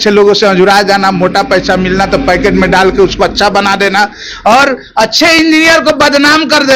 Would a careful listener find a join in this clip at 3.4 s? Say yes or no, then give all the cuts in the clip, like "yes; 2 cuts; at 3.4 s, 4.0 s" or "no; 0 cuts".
no; 0 cuts